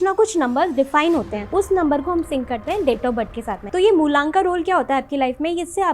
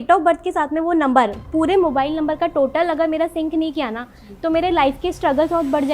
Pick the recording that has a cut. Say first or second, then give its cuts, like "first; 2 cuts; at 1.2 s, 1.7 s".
first; 2 cuts; at 1.5 s, 3.6 s